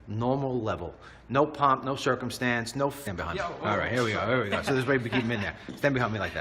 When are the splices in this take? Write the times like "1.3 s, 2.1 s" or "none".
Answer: none